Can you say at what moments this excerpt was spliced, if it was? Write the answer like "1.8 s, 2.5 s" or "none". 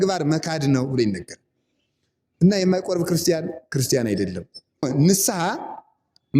4.9 s